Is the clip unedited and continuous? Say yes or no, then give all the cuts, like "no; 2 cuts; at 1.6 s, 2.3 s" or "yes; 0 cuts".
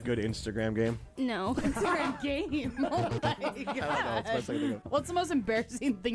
no; 1 cut; at 4.8 s